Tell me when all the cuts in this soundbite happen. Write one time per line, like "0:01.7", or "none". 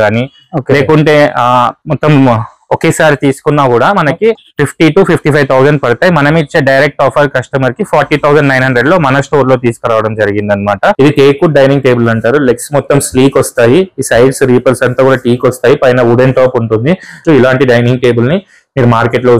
0:10.9
0:17.2